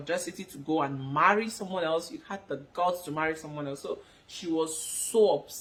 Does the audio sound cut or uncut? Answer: uncut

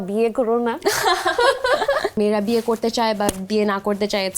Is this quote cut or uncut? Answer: cut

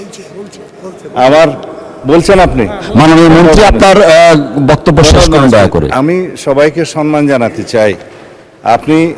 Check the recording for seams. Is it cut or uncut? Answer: uncut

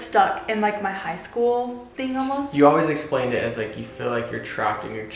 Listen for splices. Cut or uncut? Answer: uncut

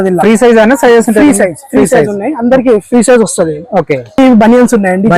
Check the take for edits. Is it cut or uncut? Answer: cut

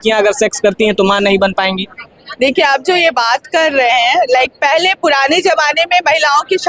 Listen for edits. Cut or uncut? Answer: uncut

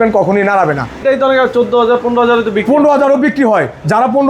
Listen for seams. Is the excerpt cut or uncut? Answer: cut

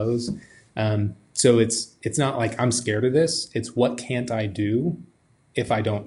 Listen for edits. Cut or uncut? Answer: uncut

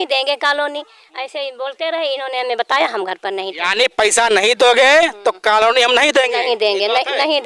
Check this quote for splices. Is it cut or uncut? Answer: uncut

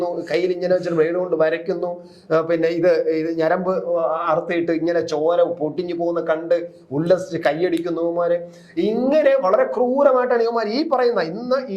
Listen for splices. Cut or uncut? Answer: uncut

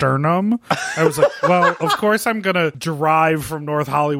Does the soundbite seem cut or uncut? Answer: cut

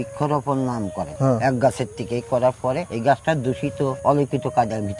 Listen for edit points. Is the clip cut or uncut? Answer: cut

